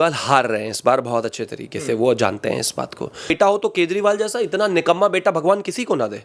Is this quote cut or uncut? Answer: cut